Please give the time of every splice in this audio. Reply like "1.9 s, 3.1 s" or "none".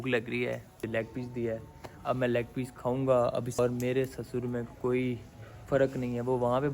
0.8 s, 3.6 s